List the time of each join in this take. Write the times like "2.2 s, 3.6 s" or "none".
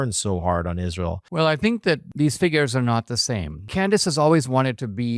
1.2 s, 2.1 s, 3.6 s